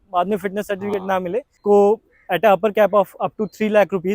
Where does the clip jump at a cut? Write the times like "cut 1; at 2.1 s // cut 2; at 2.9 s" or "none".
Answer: cut 1; at 1.6 s